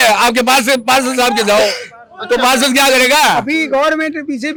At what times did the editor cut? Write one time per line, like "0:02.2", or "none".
none